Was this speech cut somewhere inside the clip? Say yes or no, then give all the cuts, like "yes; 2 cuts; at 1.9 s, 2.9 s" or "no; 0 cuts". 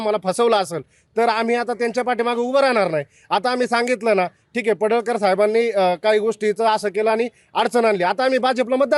no; 0 cuts